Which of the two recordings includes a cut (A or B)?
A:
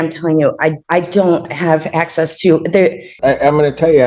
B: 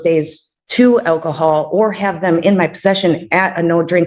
A